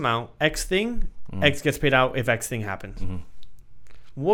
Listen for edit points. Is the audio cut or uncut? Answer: uncut